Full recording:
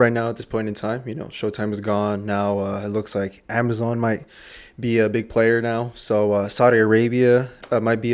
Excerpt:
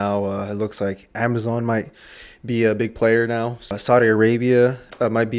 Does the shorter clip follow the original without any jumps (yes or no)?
no